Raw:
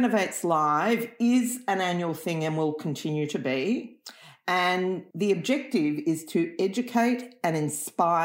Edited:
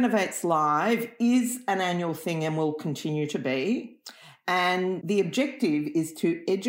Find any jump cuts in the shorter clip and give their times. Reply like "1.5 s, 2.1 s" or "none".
5.0 s